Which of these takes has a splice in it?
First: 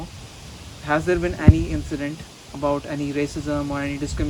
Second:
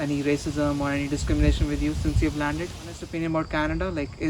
second; 1 cut; at 3.1 s

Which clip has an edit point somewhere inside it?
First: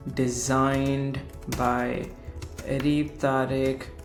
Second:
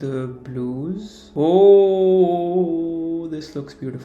second; 1 cut; at 1.2 s

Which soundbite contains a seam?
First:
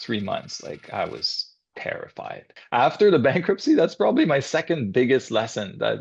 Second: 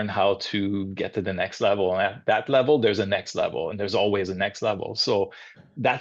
first; 2 cuts; at 0.8 s, 2.6 s

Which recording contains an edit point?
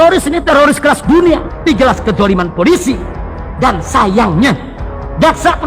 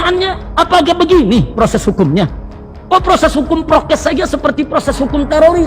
first; 1 cut; at 1.7 s

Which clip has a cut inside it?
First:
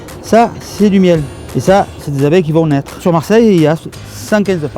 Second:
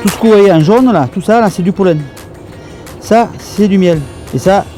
first; 1 cut; at 3.0 s

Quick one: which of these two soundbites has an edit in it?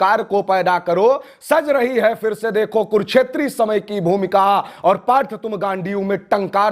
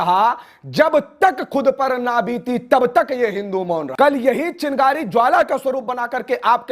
second; 1 cut; at 3.9 s

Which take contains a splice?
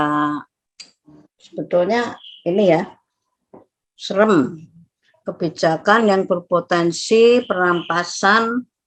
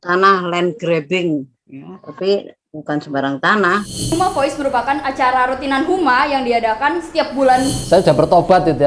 second; 2 cuts; at 4.1 s, 7.8 s

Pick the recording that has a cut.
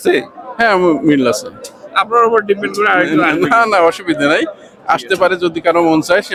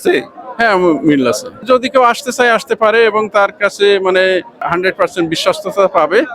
second; 2 cuts; at 1.6 s, 4.6 s

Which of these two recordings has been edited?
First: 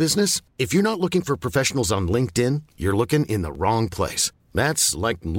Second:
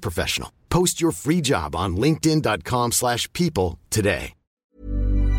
second; 1 cut; at 4.5 s

